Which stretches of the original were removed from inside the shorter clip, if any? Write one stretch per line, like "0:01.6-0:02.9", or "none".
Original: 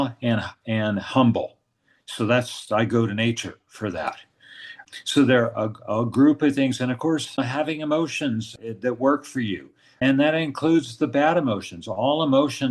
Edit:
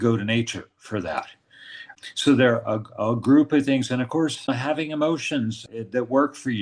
none